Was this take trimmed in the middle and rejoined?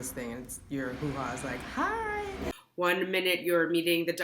yes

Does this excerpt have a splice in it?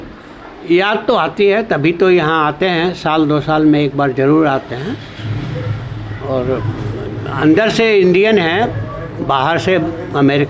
no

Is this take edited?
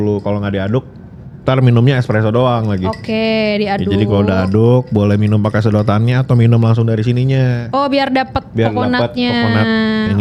no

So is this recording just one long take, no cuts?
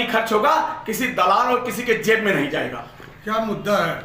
yes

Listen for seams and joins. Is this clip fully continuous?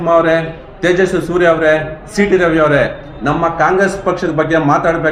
yes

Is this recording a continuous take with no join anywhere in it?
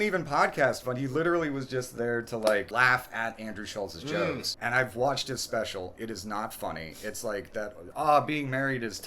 no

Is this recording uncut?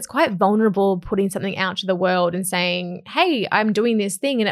yes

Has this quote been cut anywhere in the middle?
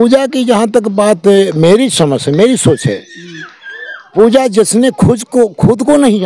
no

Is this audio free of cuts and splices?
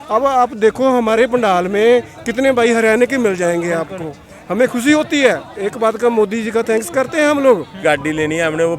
no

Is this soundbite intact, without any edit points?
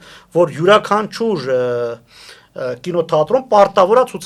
yes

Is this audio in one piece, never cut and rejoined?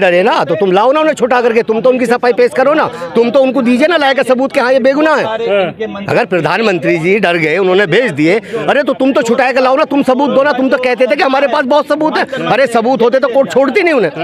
yes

